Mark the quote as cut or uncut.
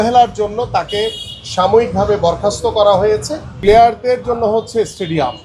cut